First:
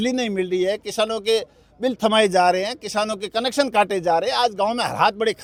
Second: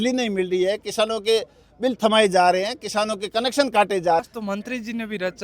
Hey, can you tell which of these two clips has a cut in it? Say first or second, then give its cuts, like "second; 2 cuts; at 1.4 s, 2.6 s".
second; 1 cut; at 4.2 s